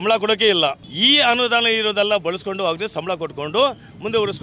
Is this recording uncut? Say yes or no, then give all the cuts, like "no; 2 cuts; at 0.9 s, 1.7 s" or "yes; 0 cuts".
yes; 0 cuts